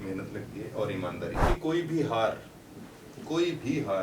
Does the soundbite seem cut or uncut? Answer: cut